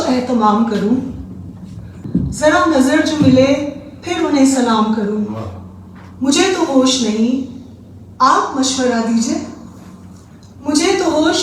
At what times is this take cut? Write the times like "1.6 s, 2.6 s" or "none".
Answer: 2.0 s

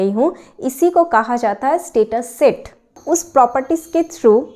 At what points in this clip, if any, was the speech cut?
2.9 s

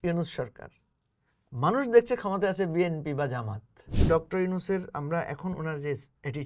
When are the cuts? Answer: 4.1 s

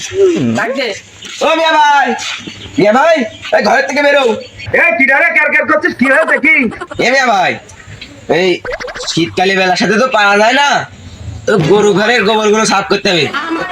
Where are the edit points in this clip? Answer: none

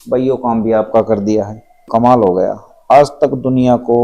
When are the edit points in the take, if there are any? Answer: 1.8 s

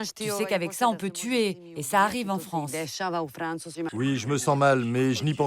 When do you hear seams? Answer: 3.9 s

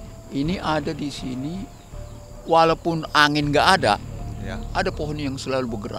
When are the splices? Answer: none

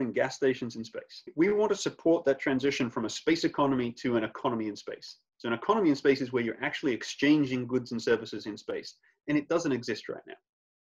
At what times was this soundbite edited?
1.3 s

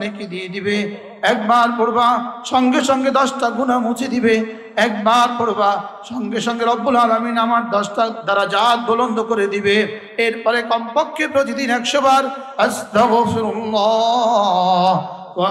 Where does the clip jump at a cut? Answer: none

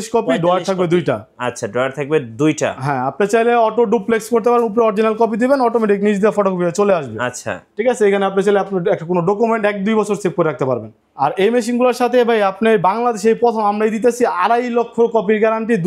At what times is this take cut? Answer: 11.0 s

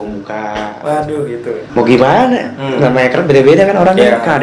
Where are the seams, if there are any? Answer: 1.7 s

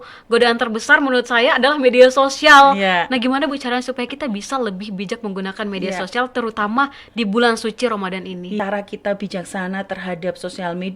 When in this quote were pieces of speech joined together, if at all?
8.6 s

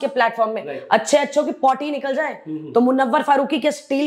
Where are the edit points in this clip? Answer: none

